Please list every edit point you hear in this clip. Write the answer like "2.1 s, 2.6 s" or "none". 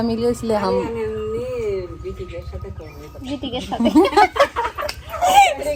none